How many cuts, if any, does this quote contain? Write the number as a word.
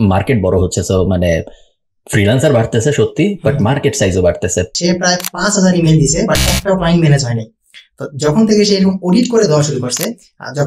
one